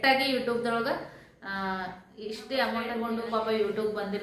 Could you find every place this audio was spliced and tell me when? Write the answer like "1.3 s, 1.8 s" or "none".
3.0 s